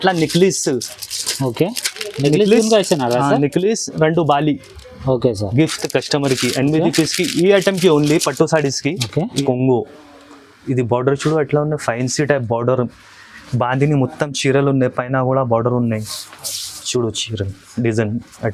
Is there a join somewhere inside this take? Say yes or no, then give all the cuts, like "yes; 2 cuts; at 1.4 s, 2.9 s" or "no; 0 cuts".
yes; 1 cut; at 9.3 s